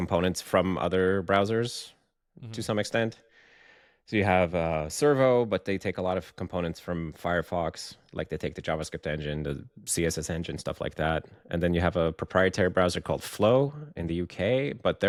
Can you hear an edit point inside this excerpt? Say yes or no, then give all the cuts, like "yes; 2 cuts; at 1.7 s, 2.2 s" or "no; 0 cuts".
no; 0 cuts